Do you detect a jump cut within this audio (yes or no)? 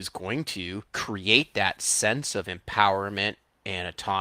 yes